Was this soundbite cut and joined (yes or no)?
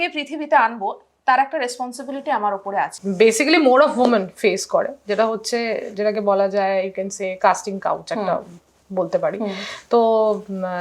yes